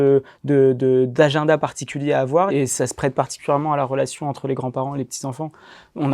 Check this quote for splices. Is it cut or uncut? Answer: cut